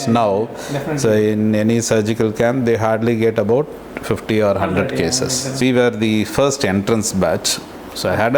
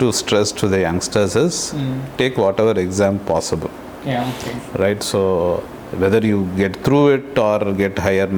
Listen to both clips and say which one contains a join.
first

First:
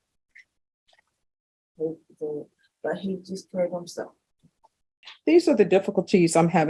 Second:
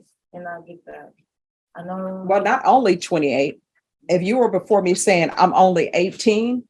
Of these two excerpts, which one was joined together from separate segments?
first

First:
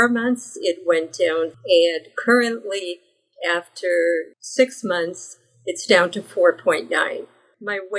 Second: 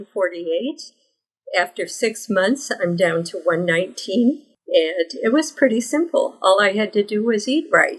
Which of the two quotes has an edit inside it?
first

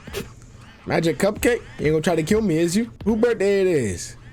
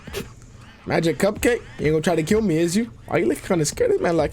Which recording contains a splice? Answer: second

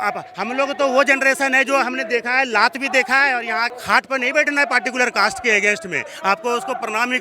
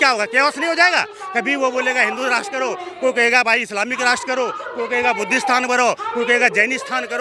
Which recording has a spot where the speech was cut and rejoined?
first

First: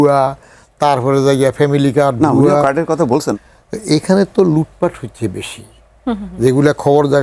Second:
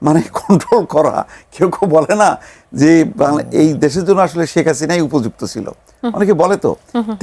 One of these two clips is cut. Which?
first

